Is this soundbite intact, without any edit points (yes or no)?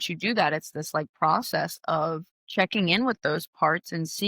no